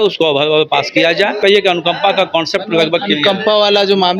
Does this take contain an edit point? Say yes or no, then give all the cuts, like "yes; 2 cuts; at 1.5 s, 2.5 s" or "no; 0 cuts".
yes; 1 cut; at 1.4 s